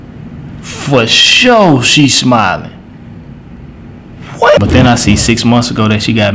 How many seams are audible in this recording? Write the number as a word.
one